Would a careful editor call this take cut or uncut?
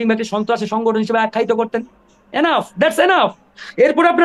uncut